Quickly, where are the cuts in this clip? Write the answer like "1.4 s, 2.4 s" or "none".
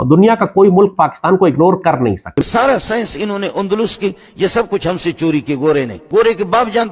2.4 s, 6.0 s